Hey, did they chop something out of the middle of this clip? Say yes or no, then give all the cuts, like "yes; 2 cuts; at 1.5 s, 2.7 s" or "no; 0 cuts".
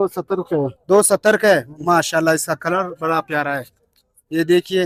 no; 0 cuts